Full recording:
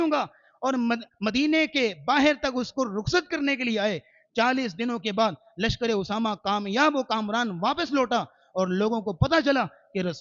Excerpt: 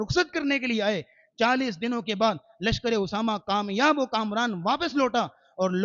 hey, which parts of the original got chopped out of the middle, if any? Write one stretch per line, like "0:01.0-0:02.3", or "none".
none